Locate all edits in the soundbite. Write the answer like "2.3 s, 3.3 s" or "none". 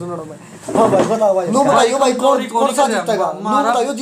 1.5 s